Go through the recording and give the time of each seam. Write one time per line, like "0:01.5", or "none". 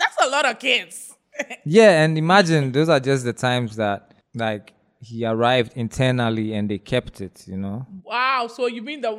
0:04.2
0:07.9